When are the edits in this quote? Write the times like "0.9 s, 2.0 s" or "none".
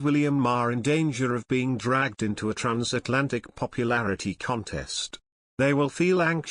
5.5 s